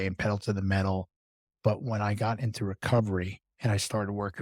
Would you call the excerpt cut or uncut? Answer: uncut